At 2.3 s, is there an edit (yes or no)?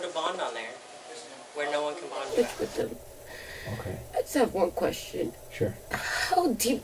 yes